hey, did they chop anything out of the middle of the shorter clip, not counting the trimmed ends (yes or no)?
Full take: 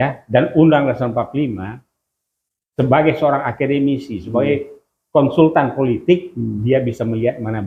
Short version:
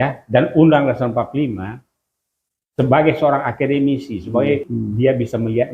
yes